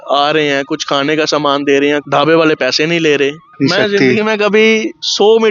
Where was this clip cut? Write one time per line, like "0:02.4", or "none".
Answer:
0:02.0
0:03.4